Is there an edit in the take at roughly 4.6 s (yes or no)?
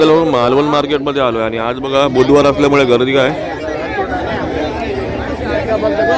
no